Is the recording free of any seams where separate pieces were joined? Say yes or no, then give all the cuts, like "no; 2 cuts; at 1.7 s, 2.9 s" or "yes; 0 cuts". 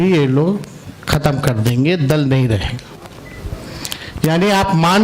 yes; 0 cuts